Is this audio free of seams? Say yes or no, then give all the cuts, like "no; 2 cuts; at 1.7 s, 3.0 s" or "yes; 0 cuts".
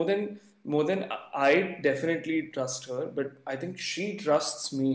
yes; 0 cuts